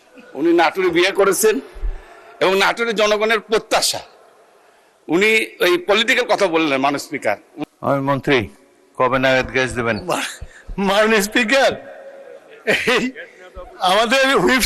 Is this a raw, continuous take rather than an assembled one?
no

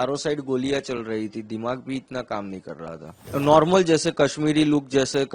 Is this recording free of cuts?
no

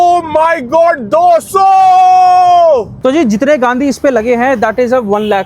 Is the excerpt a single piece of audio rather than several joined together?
no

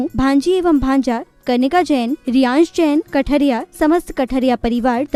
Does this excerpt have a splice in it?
no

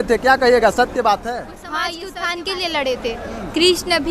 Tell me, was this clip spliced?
yes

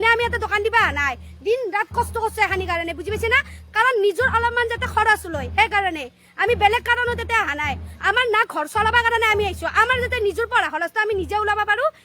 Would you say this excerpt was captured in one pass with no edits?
yes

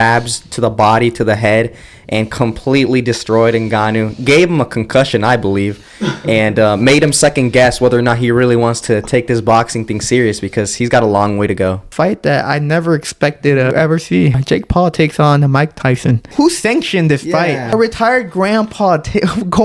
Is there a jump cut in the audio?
yes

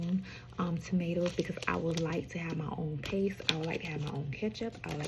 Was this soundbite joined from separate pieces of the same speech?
no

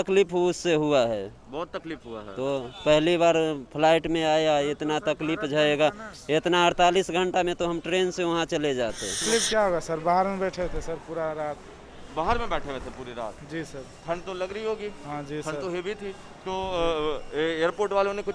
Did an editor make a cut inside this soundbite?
yes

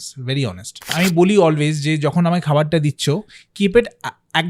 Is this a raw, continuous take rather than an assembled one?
no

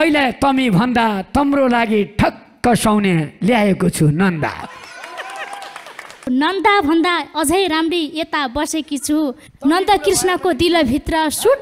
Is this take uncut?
yes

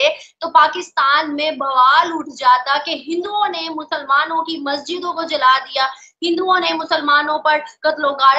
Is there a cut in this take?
no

